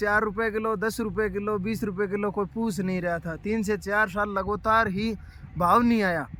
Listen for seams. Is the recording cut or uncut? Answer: uncut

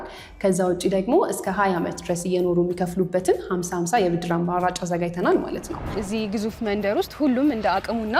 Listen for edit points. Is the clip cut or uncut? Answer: cut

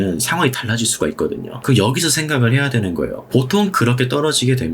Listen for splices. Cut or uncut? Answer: cut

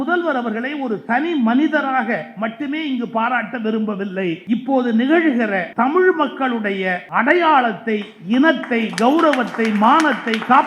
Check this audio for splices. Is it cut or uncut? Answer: cut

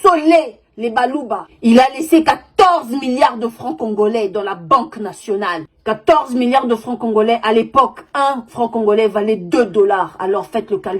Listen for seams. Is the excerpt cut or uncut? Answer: cut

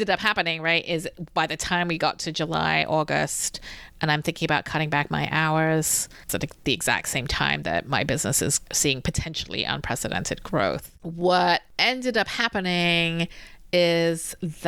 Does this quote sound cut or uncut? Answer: cut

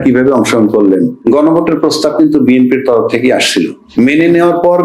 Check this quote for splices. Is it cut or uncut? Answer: cut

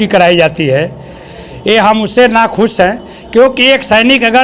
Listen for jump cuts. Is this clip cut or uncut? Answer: uncut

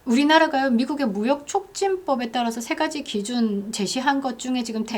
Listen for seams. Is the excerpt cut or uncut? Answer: uncut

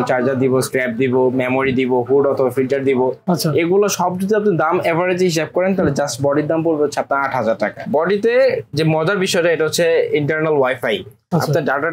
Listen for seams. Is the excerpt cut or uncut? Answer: cut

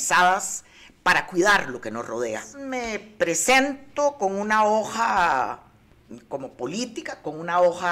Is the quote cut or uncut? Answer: cut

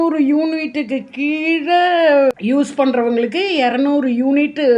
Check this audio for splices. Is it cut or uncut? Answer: cut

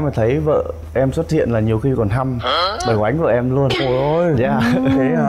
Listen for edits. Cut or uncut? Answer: uncut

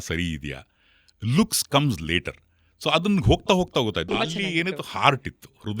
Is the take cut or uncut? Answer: cut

